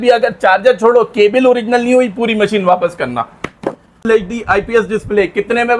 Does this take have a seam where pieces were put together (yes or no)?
yes